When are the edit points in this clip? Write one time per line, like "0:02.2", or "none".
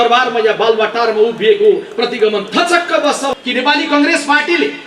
0:03.3